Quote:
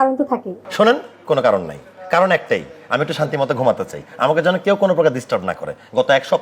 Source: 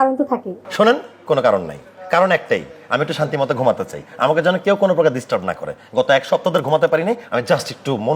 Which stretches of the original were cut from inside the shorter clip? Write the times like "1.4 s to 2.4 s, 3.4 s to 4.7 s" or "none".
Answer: none